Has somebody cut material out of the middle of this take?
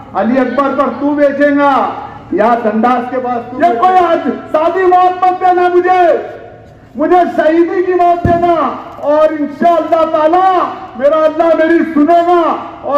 yes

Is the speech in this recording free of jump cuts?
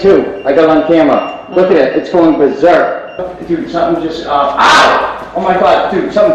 no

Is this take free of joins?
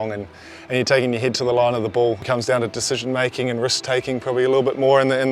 no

